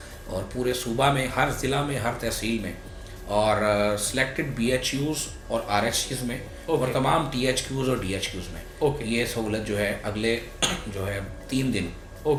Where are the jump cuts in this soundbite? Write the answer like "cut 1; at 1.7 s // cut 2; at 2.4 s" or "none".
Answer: none